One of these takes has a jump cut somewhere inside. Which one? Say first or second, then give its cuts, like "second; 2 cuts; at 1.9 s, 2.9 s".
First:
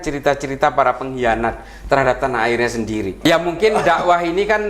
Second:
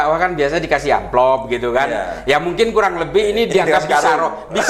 first; 1 cut; at 3.2 s